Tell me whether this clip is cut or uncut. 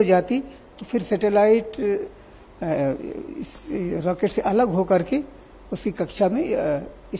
uncut